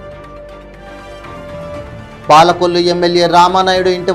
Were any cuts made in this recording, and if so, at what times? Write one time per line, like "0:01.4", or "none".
0:01.8